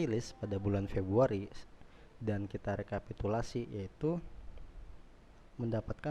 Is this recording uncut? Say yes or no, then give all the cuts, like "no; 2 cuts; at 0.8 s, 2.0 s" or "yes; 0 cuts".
yes; 0 cuts